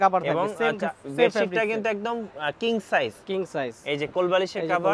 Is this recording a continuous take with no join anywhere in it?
yes; 0 cuts

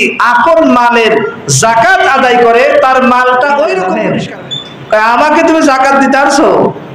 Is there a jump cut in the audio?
yes; 1 cut; at 4.0 s

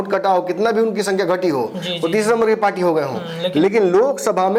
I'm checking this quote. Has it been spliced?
no; 0 cuts

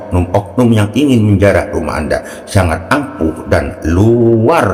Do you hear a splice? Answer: no; 0 cuts

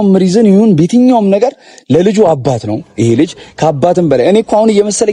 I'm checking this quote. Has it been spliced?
no; 0 cuts

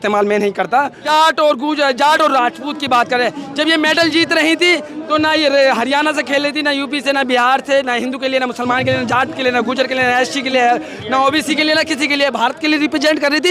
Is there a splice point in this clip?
yes; 1 cut; at 1.0 s

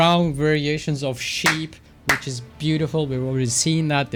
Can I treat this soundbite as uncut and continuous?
yes; 0 cuts

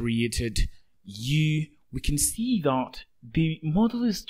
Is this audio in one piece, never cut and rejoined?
yes; 0 cuts

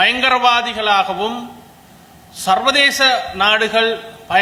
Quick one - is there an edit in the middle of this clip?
no; 0 cuts

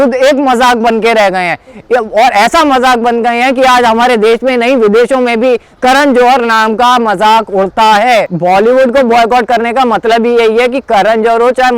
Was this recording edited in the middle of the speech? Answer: yes; 1 cut; at 8.3 s

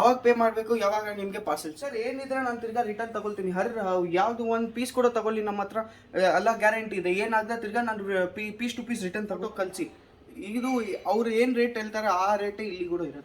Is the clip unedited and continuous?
no; 2 cuts; at 1.7 s, 9.4 s

